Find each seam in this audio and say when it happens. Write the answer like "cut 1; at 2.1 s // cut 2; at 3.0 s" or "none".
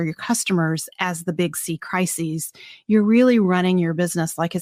none